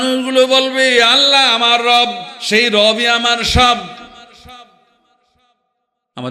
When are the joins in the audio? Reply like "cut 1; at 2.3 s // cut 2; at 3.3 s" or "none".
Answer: none